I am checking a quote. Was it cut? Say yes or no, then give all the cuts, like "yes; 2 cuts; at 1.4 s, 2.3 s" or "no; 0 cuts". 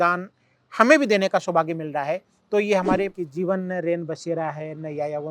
yes; 1 cut; at 3.2 s